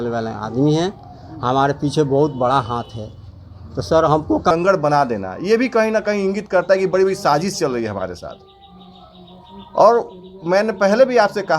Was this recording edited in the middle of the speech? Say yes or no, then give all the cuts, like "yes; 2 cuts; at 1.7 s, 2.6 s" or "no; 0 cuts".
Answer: yes; 1 cut; at 4.5 s